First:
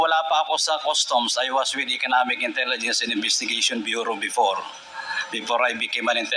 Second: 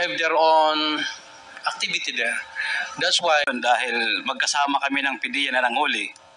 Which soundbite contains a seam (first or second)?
second